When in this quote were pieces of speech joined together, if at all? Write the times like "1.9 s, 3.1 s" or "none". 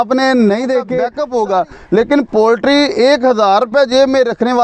1.2 s